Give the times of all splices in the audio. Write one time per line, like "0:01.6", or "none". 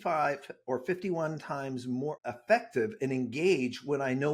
0:02.1